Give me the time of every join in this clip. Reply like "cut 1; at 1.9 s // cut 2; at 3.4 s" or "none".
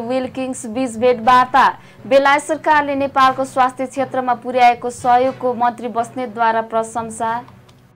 none